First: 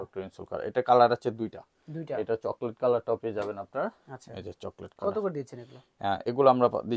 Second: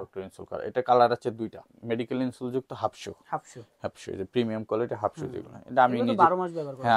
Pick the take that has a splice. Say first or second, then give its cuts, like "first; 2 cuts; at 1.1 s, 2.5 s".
second; 1 cut; at 1.7 s